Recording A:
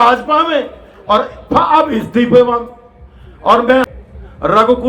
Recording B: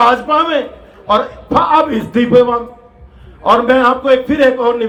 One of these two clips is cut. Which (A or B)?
A